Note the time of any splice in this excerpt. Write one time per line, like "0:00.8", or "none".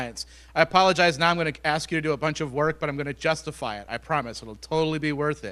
none